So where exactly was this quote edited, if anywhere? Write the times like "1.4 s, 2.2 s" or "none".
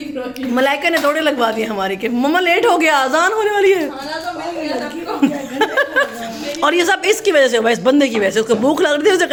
none